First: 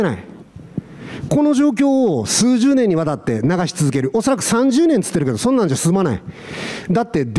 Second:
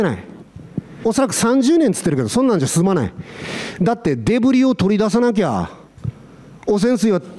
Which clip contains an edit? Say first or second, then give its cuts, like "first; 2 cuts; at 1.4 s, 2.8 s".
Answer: second; 1 cut; at 1.0 s